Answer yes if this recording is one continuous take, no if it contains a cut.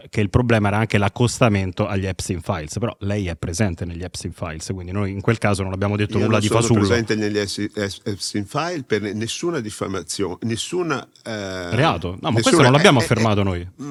yes